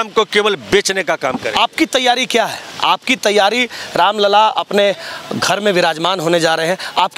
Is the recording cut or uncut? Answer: uncut